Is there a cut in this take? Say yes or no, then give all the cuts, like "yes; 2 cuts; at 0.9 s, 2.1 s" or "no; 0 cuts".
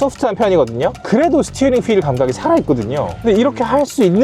yes; 2 cuts; at 1.0 s, 3.1 s